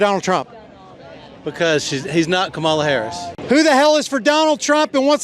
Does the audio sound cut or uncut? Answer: cut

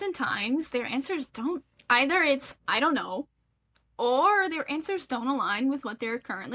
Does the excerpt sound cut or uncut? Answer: uncut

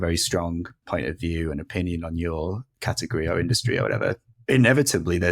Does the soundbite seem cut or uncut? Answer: cut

